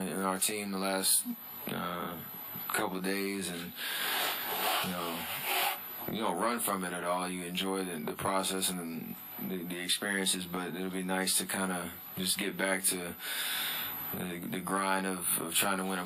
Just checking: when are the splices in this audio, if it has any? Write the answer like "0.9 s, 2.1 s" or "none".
none